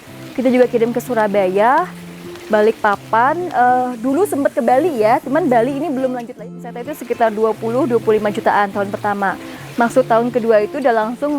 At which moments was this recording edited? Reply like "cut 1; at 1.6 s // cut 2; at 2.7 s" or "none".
cut 1; at 6.5 s